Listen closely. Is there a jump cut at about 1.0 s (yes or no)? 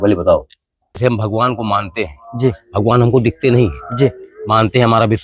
yes